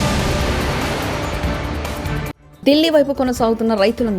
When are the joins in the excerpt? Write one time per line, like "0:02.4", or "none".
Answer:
0:02.4